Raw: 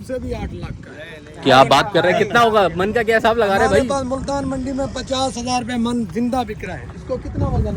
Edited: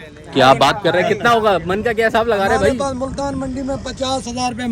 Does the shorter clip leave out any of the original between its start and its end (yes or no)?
no